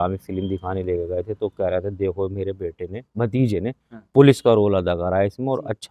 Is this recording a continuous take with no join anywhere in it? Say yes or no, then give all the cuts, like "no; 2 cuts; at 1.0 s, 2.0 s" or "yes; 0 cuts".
yes; 0 cuts